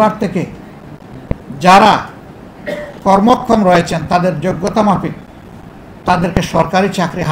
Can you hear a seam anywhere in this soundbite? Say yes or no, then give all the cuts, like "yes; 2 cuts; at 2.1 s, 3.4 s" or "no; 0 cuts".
no; 0 cuts